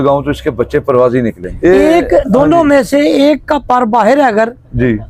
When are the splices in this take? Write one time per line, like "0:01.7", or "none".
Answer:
0:01.5